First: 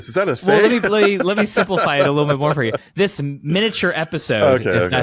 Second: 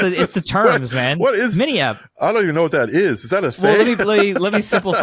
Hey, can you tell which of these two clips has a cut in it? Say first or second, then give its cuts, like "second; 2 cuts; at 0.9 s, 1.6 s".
second; 1 cut; at 2.2 s